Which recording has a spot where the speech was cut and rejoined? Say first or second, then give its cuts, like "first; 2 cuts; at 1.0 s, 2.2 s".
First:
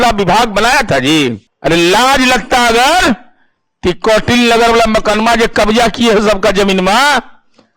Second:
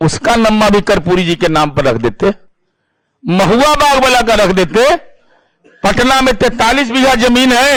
first; 1 cut; at 1.5 s